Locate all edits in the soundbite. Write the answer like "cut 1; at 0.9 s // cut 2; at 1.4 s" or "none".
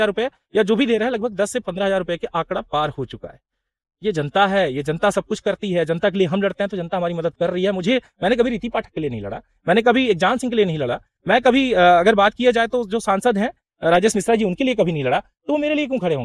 none